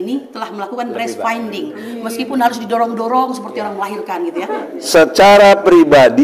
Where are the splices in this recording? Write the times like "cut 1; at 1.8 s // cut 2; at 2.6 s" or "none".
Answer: cut 1; at 4.7 s